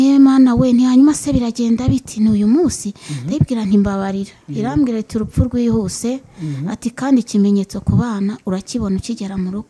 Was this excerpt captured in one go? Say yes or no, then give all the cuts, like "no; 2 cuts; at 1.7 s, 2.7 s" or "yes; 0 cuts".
yes; 0 cuts